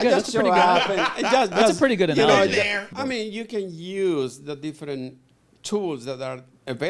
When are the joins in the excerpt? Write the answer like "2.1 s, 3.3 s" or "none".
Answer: 2.9 s